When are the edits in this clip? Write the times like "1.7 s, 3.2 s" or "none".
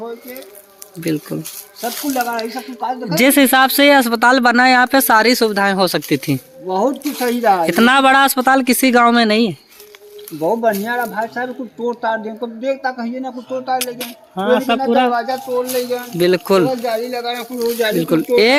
none